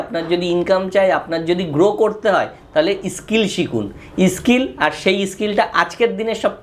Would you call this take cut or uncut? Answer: uncut